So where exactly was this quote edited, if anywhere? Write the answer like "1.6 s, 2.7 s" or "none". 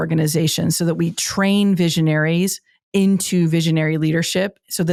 none